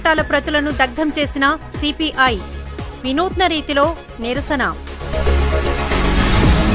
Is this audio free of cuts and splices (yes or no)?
yes